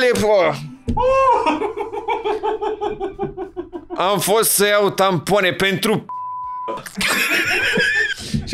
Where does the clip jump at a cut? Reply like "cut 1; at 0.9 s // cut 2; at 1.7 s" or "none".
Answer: none